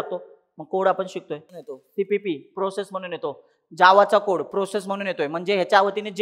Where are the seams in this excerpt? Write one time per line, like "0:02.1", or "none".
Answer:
0:01.6